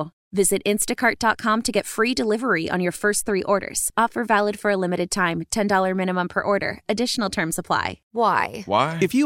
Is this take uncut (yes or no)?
no